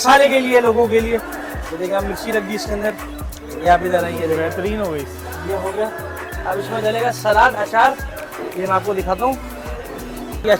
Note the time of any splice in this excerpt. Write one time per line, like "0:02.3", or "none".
none